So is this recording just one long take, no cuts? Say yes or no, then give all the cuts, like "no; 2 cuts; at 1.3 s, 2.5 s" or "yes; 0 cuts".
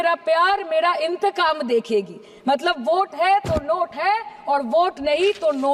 yes; 0 cuts